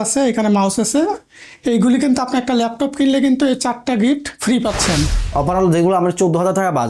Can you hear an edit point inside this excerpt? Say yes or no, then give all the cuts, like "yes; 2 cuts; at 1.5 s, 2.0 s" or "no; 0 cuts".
yes; 1 cut; at 5.2 s